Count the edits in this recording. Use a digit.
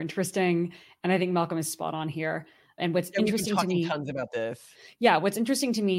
0